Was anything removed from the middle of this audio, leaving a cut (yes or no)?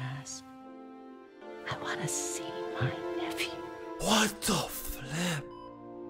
yes